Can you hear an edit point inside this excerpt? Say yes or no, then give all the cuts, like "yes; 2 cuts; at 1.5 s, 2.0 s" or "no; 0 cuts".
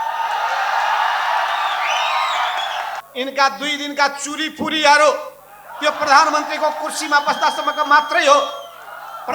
yes; 1 cut; at 3.0 s